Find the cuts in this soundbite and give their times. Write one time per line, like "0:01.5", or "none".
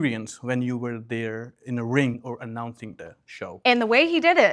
0:02.1
0:03.5